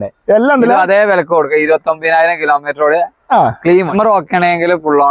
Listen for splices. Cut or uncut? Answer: cut